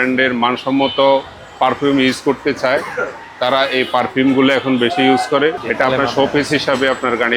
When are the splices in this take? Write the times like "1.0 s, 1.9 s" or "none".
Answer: 5.6 s